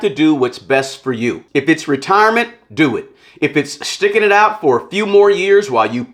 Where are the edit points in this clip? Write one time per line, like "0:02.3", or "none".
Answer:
none